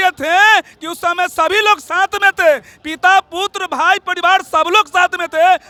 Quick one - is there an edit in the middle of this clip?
no; 0 cuts

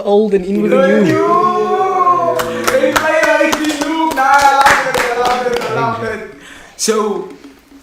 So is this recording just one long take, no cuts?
yes; 0 cuts

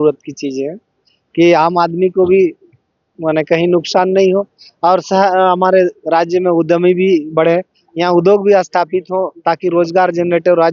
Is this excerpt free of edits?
yes; 0 cuts

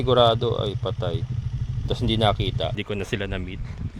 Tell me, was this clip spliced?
yes; 1 cut; at 2.7 s

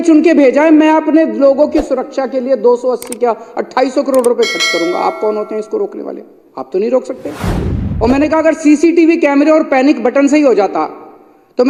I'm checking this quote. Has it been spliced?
no; 0 cuts

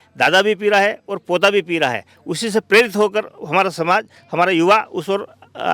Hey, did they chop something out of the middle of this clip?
no; 0 cuts

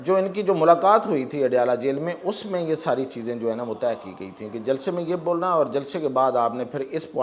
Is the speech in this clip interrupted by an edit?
no; 0 cuts

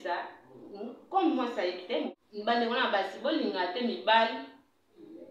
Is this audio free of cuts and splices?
no; 1 cut; at 2.1 s

